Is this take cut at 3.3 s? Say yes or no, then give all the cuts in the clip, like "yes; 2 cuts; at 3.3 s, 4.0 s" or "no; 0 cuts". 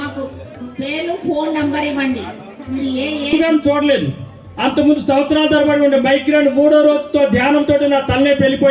yes; 1 cut; at 3.3 s